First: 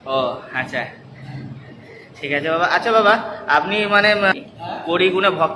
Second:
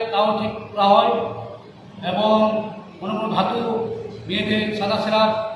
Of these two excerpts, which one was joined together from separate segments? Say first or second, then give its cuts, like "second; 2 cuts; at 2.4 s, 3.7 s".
first; 1 cut; at 4.3 s